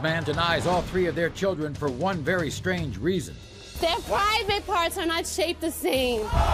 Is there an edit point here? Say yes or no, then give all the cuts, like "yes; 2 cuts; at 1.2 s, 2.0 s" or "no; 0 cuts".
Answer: no; 0 cuts